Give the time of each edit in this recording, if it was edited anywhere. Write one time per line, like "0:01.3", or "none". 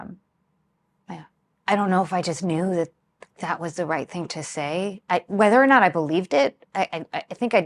0:01.4